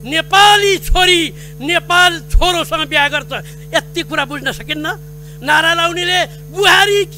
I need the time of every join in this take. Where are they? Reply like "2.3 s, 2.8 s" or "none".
none